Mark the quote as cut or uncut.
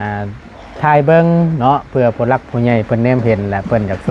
uncut